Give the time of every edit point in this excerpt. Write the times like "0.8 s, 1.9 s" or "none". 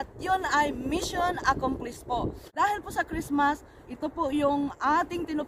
2.4 s